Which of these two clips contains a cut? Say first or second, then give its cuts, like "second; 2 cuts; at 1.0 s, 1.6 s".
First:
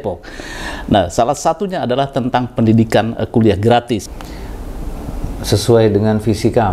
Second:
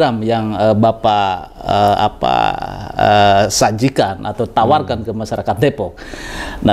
first; 1 cut; at 4.1 s